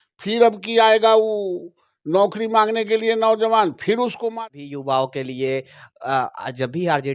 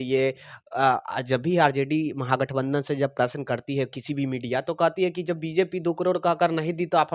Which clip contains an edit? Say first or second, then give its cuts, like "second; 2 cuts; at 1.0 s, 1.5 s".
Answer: first; 1 cut; at 4.3 s